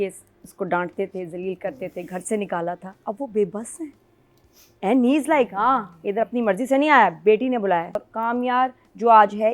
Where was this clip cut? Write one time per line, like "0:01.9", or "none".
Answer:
0:08.1